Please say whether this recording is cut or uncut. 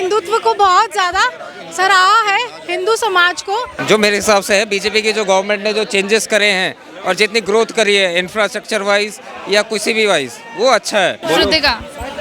cut